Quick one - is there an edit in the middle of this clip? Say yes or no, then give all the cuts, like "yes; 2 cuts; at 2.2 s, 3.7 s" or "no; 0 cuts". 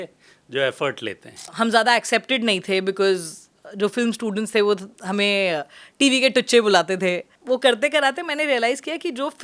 yes; 2 cuts; at 1.5 s, 7.3 s